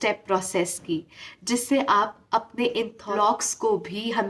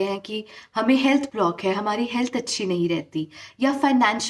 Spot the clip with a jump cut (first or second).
first